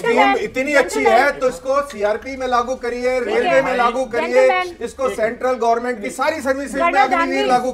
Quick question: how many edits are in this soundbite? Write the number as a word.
zero